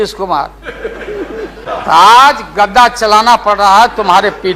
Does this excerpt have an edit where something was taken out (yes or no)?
yes